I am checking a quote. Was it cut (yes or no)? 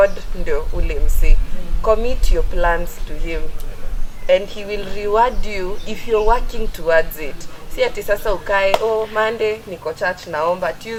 no